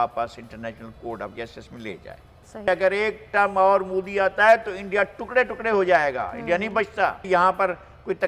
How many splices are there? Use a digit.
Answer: 2